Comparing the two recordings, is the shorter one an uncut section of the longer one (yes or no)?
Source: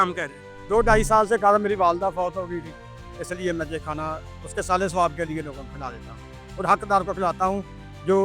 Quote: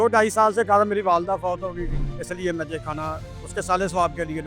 no